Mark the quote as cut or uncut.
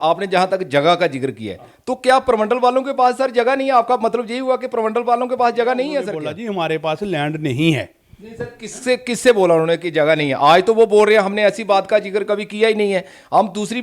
cut